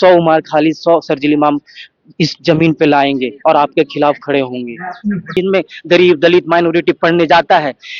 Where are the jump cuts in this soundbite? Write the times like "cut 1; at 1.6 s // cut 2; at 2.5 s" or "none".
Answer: cut 1; at 5.3 s